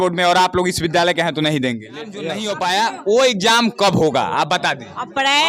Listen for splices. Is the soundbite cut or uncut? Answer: cut